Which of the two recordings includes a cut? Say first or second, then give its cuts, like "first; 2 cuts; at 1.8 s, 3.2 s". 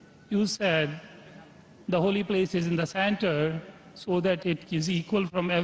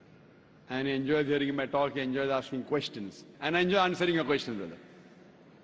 second; 1 cut; at 2.0 s